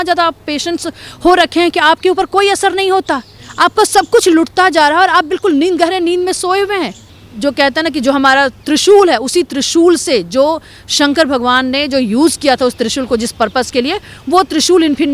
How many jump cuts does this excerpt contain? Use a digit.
1